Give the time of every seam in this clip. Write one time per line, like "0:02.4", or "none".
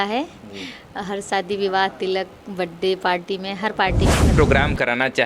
0:04.3